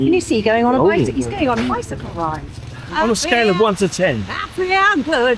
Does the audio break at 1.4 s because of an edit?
no; 1 cut; at 2.8 s

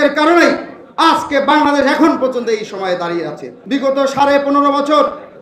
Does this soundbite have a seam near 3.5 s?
yes; 1 cut; at 3.5 s

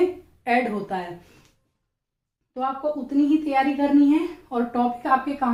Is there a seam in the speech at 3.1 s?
no; 0 cuts

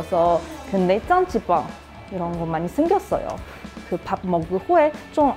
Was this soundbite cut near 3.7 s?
yes; 1 cut; at 3.7 s

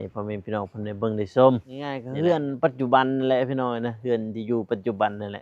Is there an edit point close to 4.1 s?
no; 1 cut; at 2.0 s

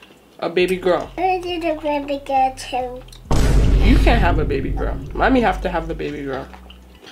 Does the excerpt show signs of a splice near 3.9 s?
no; 1 cut; at 1.1 s

